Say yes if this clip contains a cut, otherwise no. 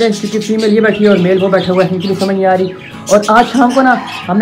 no